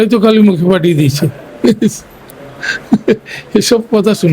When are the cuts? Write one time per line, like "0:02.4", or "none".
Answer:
none